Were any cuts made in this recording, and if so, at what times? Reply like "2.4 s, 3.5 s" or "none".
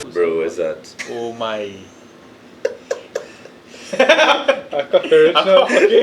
0.9 s